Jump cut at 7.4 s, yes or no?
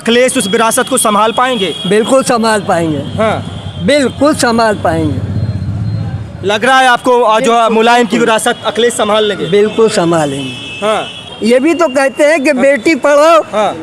no